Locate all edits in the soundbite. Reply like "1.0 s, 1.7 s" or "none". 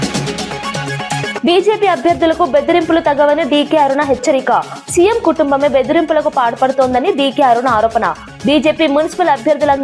1.4 s